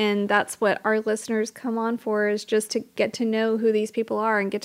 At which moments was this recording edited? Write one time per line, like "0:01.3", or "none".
0:02.9